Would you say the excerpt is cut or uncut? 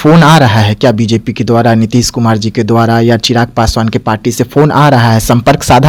uncut